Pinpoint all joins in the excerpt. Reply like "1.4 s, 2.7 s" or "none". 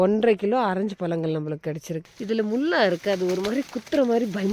2.0 s